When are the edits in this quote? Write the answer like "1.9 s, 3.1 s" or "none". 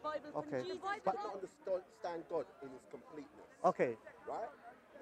1.1 s